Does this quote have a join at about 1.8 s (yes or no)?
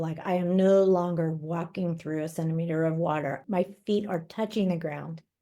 no